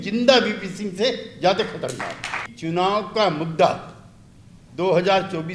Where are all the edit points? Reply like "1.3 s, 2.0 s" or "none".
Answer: 2.5 s